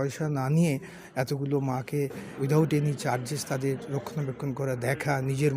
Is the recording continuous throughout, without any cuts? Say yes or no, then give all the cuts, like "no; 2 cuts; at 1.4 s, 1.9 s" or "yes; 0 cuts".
no; 1 cut; at 2.2 s